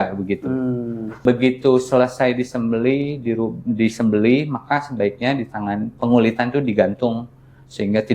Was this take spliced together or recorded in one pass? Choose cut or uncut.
cut